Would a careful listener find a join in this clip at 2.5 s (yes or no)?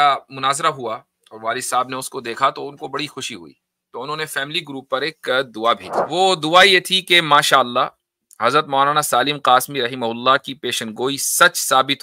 no